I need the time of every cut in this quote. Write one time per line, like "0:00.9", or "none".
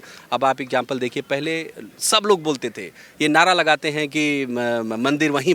none